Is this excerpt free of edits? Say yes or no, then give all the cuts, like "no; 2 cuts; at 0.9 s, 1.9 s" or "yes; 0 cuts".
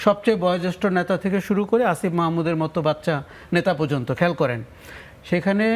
yes; 0 cuts